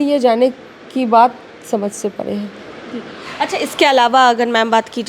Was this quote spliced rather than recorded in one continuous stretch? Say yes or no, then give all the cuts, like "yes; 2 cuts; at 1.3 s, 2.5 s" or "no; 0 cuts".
no; 0 cuts